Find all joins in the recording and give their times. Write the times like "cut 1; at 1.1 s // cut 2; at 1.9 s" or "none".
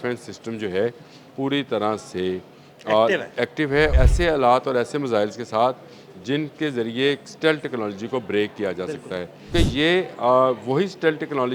cut 1; at 3.9 s // cut 2; at 9.5 s